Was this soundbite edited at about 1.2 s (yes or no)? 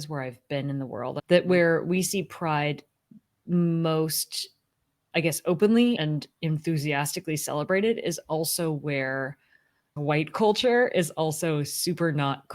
yes